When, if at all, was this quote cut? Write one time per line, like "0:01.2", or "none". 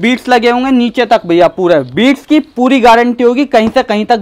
none